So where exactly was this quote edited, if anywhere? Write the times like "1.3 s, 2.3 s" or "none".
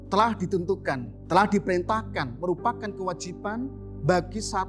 1.1 s